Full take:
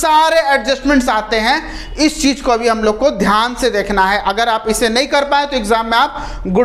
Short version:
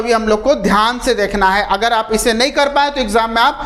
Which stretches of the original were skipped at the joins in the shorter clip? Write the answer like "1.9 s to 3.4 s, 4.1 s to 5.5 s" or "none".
none